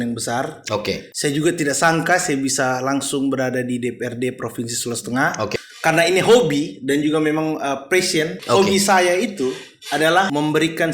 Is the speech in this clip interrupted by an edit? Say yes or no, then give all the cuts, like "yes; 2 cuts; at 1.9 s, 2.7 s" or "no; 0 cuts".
yes; 3 cuts; at 1.1 s, 5.5 s, 8.4 s